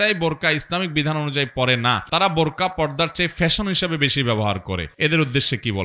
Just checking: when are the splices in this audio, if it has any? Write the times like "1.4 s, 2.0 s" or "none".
2.0 s, 4.9 s